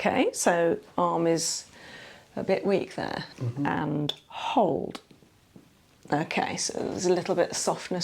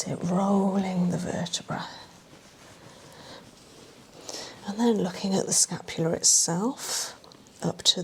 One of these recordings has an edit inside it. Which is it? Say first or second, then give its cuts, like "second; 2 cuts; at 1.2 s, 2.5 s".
first; 1 cut; at 3.3 s